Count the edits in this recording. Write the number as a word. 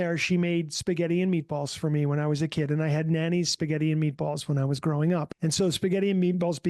one